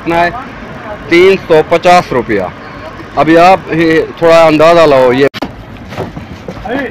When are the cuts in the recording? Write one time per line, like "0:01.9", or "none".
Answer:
0:05.3